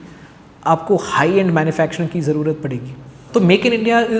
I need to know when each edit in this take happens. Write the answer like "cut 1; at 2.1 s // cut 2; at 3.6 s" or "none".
cut 1; at 3.1 s